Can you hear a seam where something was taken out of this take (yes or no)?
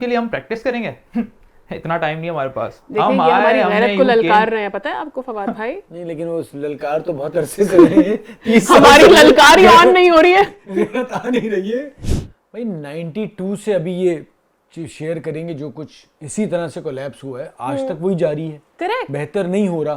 yes